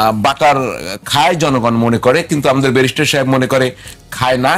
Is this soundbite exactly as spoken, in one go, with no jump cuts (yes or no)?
yes